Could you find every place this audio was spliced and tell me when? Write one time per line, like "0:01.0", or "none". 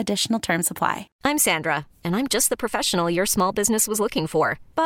0:01.1